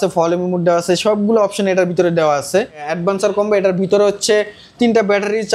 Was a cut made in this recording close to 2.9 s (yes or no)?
yes